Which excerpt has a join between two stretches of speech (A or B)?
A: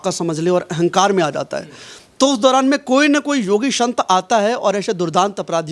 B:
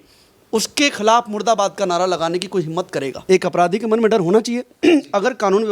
B